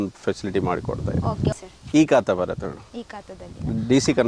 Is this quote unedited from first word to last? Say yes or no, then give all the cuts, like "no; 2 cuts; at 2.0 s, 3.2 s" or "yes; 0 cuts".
no; 1 cut; at 1.5 s